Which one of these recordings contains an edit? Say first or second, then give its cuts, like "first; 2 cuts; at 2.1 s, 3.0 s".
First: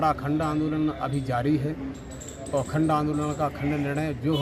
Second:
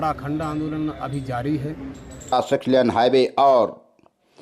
second; 1 cut; at 2.3 s